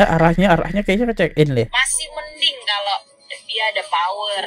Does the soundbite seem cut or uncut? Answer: cut